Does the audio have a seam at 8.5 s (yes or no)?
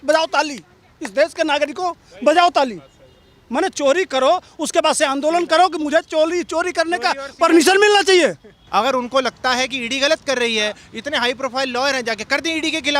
yes